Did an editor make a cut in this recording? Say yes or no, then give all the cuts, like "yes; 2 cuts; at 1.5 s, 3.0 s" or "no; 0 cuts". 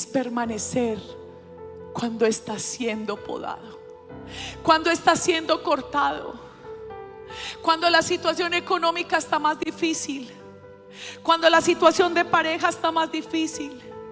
no; 0 cuts